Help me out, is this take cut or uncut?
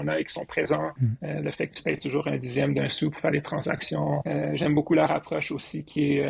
cut